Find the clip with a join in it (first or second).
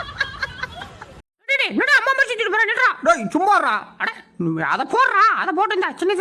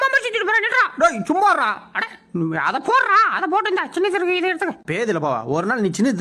first